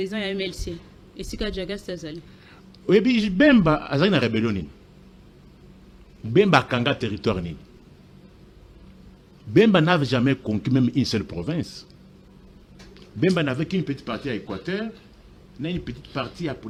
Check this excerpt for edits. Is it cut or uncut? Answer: uncut